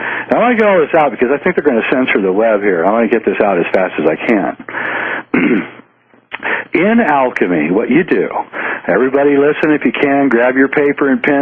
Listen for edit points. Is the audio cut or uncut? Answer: cut